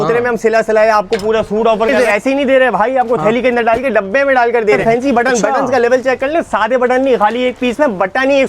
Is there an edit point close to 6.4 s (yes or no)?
no